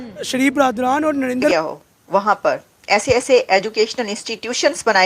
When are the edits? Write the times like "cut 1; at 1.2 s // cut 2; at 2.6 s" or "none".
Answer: cut 1; at 1.5 s